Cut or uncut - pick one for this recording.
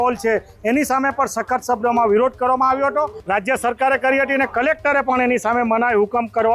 cut